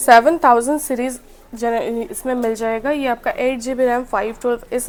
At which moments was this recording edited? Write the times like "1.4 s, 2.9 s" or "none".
none